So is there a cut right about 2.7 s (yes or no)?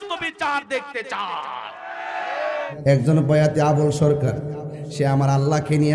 yes